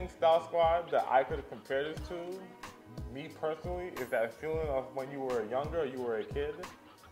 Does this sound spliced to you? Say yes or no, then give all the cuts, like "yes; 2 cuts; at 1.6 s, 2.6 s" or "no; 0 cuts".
no; 0 cuts